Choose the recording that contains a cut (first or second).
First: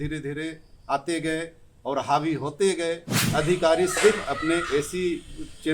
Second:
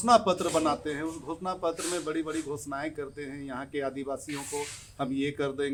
first